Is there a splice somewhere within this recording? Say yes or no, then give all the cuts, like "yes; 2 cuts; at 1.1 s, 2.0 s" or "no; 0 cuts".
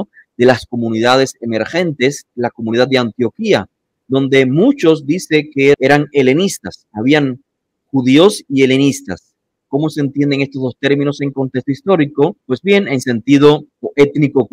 yes; 2 cuts; at 2.3 s, 5.8 s